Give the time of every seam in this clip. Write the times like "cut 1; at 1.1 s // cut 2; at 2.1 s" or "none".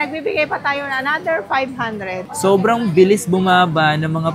cut 1; at 2.3 s